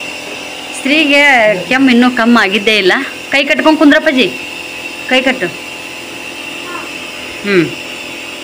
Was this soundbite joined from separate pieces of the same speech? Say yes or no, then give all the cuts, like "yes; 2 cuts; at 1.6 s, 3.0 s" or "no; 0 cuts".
no; 0 cuts